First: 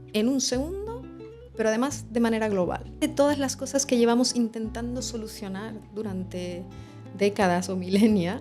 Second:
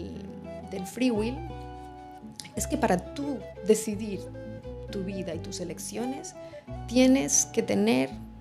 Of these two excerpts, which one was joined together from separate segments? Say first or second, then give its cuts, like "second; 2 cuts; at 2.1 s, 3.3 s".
first; 1 cut; at 2.9 s